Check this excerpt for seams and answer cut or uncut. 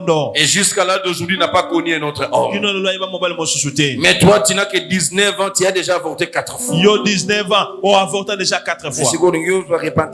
uncut